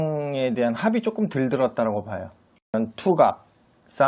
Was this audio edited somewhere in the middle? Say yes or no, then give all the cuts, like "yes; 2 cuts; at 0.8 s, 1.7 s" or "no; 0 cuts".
yes; 1 cut; at 2.6 s